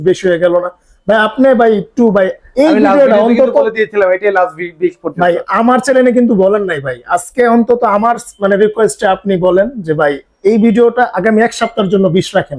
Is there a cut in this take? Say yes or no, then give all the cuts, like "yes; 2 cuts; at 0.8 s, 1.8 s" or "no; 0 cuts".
no; 0 cuts